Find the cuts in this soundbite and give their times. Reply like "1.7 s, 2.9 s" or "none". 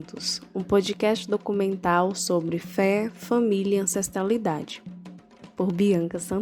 none